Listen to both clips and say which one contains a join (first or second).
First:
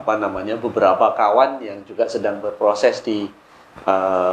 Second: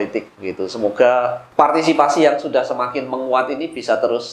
second